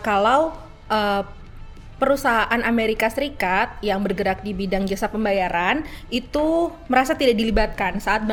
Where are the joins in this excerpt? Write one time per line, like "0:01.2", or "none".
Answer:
none